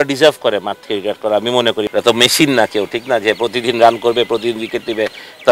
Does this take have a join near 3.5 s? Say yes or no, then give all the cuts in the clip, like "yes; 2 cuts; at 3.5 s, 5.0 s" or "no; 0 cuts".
no; 1 cut; at 1.8 s